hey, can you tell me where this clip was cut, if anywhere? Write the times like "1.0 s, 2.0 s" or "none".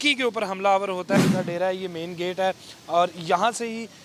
1.2 s